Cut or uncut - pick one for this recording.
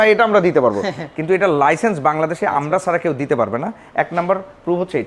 uncut